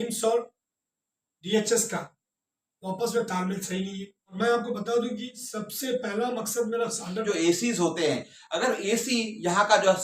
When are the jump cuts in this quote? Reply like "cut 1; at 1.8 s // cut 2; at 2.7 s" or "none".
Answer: cut 1; at 4.3 s // cut 2; at 7.2 s